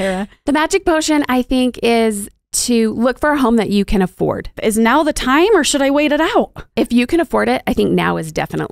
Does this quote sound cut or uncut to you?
cut